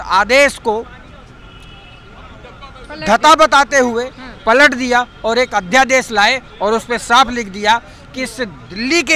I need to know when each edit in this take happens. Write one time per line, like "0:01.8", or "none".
none